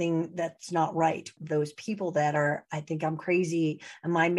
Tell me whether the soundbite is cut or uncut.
cut